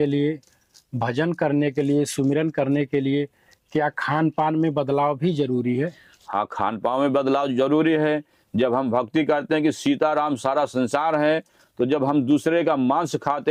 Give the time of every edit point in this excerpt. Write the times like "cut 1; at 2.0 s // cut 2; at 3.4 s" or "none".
none